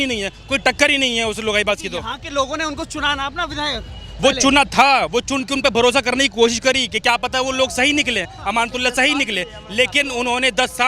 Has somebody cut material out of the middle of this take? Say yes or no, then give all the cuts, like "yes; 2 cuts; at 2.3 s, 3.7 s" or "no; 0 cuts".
no; 0 cuts